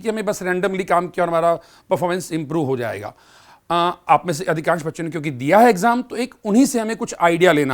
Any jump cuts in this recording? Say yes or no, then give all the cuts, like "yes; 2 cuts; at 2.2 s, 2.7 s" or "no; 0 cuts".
no; 0 cuts